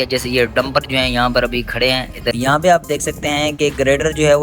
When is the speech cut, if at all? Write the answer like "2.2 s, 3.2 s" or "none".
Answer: 2.3 s